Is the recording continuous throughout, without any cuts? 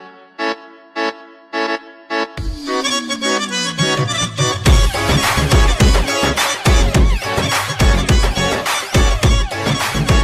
yes; 0 cuts

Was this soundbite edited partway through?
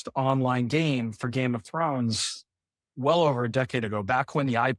no; 0 cuts

